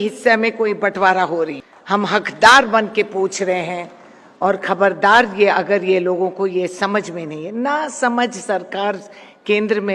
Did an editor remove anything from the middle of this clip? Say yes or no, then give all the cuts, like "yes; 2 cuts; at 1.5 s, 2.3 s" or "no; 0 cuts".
yes; 1 cut; at 1.7 s